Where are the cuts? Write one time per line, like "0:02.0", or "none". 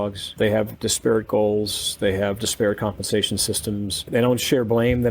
0:04.0